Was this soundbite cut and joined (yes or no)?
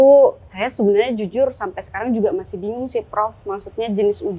no